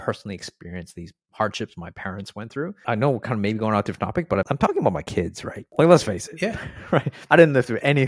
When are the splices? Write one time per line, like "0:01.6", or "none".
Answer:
0:02.8
0:04.5
0:07.1